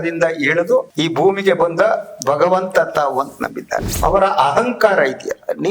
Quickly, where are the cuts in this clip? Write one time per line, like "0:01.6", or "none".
0:00.9
0:03.9